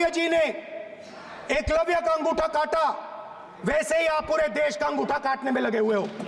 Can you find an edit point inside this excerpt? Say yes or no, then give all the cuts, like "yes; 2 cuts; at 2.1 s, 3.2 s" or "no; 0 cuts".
no; 0 cuts